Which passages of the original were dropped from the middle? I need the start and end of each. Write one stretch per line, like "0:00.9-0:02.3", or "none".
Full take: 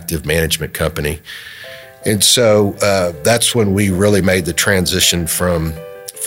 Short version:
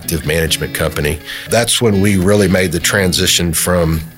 0:01.4-0:03.2